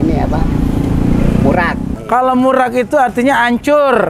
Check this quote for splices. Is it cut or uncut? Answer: cut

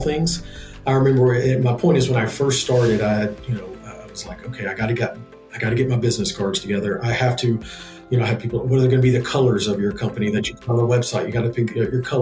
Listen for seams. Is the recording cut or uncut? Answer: uncut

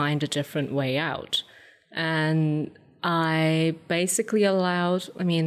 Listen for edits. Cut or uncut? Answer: uncut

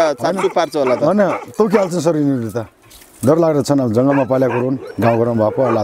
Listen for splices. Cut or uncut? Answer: cut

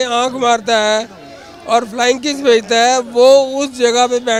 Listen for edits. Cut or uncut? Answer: uncut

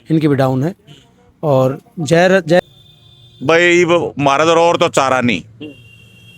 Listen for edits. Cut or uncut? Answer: cut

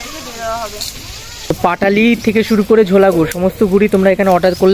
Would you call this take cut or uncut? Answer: cut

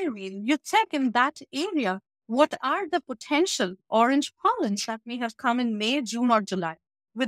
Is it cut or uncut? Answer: uncut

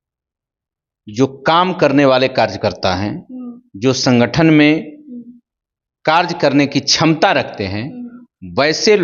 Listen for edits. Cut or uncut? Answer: uncut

